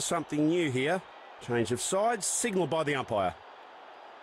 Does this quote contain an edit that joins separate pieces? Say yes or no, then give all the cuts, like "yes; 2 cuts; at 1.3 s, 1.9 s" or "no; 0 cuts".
no; 0 cuts